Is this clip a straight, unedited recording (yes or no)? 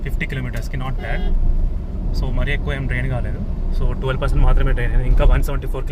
yes